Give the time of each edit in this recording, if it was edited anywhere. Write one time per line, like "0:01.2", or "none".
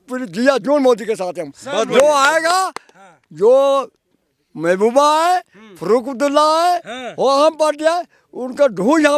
none